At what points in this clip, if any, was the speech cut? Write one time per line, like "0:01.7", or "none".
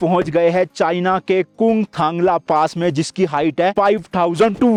none